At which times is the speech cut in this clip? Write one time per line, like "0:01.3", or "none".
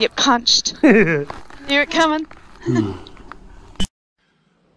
none